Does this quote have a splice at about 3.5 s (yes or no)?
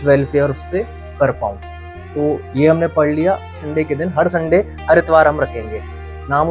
yes